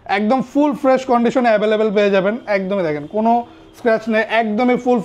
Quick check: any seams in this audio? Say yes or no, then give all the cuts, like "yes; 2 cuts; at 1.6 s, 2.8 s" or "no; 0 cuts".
no; 0 cuts